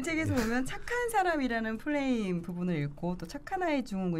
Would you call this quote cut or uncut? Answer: uncut